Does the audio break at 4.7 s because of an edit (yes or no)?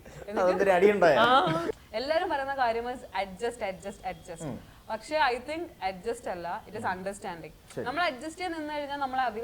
no